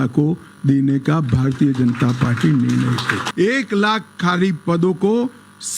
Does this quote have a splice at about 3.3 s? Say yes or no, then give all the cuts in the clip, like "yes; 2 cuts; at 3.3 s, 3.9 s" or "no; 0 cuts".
yes; 1 cut; at 3.3 s